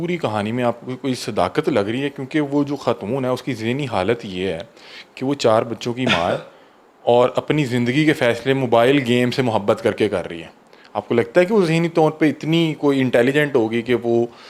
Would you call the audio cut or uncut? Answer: uncut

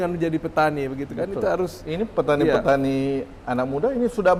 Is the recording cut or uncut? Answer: uncut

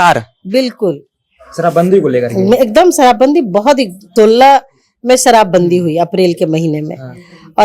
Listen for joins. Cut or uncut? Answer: cut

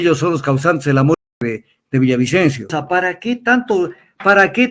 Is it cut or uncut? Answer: cut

